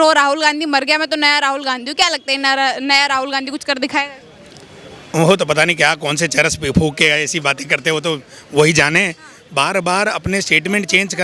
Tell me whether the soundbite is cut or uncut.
uncut